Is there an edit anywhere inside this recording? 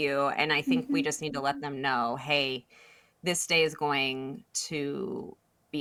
no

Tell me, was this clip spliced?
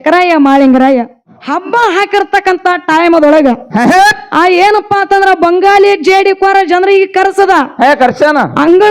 yes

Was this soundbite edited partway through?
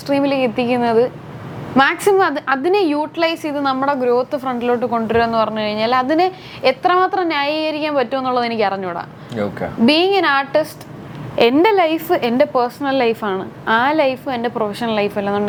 no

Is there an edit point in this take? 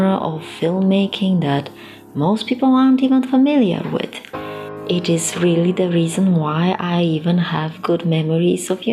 yes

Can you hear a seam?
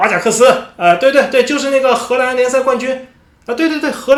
no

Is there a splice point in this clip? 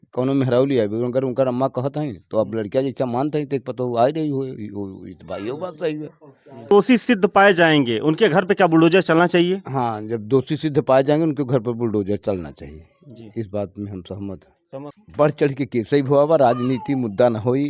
yes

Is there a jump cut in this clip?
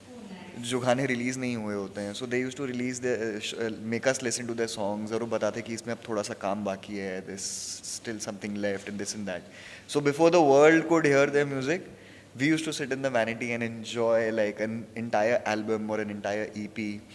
no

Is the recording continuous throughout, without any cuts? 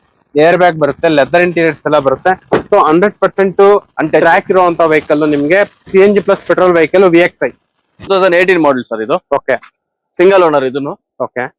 no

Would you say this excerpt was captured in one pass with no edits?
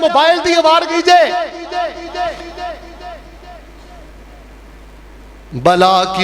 yes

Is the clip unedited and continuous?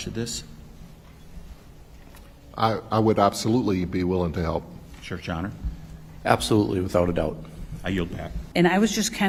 yes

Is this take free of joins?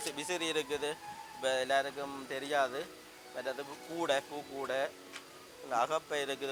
yes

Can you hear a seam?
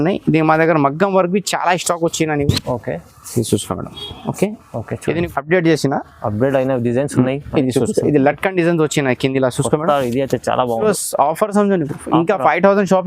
yes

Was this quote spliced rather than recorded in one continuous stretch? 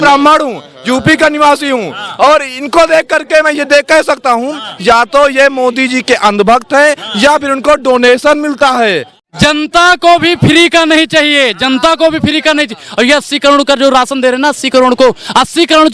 yes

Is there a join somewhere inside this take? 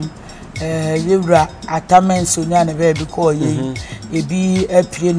no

